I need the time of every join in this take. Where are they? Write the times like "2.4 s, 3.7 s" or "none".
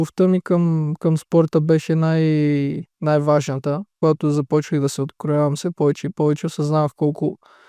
3.9 s

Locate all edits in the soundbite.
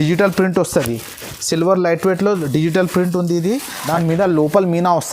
3.7 s

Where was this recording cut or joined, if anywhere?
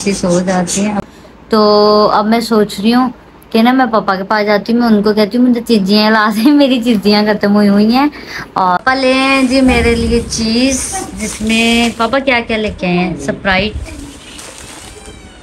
1.0 s, 8.8 s

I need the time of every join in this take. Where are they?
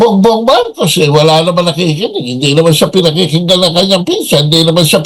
none

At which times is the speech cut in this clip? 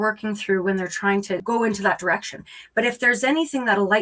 1.4 s

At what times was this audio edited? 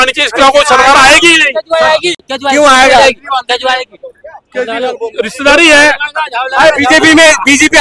none

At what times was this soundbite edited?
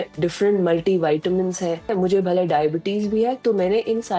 1.9 s

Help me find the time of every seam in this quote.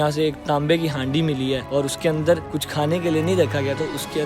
1.6 s, 2.6 s

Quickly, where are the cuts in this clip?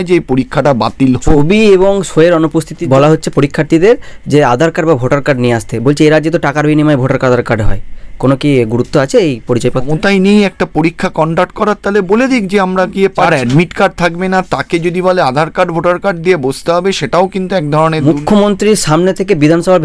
1.4 s, 2.8 s, 9.9 s, 13.3 s, 18.0 s

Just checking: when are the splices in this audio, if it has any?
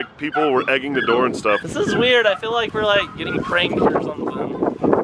1.6 s

